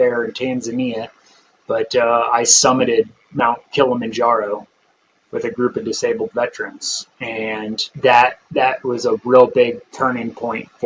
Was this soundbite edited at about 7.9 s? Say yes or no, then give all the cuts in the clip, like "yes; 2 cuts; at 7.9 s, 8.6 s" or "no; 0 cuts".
yes; 1 cut; at 7.9 s